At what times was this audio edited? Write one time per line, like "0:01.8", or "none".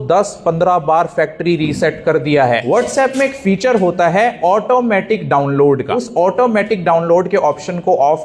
0:03.0
0:06.0